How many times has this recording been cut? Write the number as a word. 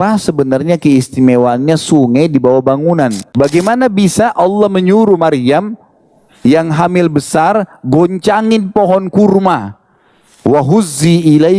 one